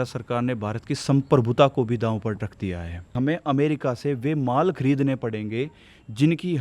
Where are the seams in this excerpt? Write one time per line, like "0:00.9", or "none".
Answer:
0:03.1